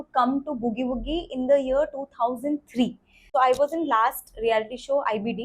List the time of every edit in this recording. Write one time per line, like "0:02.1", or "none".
0:03.2

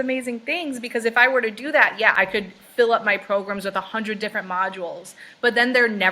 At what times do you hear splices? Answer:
0:02.1

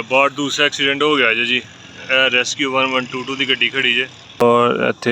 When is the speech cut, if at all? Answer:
0:04.2

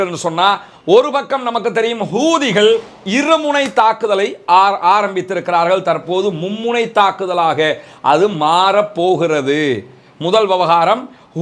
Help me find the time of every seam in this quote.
none

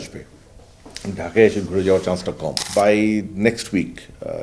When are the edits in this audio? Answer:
0:02.6

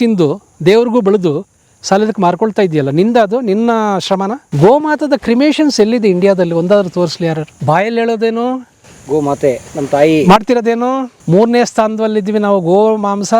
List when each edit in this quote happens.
0:04.4
0:07.5
0:09.7
0:11.1

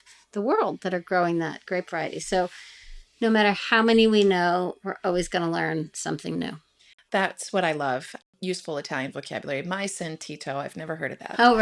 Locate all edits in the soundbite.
0:08.2

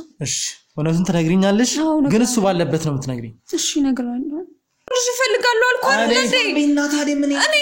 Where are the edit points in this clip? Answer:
0:04.9

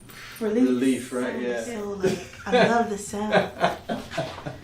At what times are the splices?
0:01.7

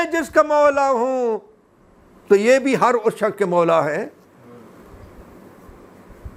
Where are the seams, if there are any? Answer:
none

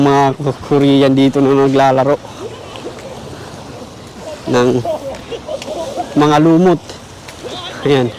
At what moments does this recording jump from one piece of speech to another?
none

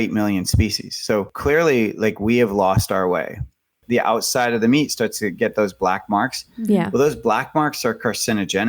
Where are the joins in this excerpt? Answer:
0:01.3
0:03.8

